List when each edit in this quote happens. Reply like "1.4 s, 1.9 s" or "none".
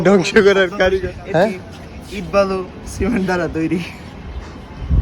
1.2 s